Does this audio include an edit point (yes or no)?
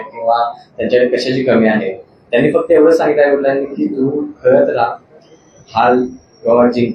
no